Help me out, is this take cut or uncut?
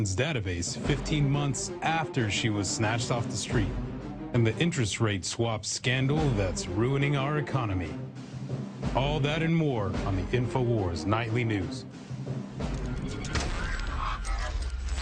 uncut